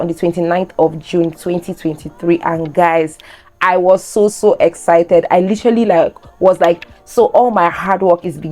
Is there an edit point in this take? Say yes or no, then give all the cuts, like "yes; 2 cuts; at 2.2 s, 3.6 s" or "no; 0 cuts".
no; 0 cuts